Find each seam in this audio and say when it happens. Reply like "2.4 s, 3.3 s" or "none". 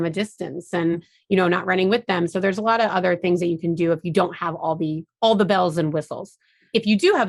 none